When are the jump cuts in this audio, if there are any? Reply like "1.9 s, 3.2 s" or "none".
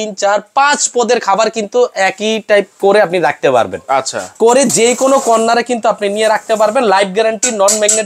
none